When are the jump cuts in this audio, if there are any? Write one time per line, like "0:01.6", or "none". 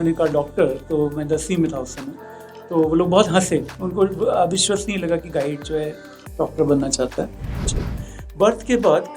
0:07.7